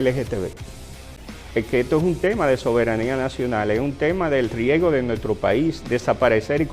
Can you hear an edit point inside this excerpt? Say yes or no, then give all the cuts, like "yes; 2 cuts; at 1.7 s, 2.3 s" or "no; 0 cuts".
yes; 1 cut; at 1.2 s